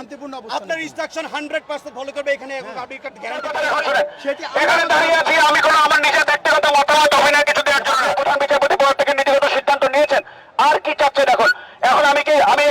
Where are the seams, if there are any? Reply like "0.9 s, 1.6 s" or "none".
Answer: 3.5 s, 8.0 s